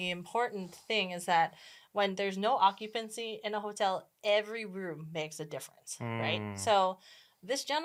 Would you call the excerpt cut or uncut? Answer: uncut